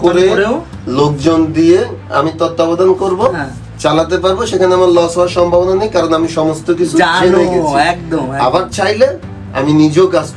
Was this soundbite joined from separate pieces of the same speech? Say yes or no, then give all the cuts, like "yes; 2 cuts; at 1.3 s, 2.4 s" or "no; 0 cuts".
no; 0 cuts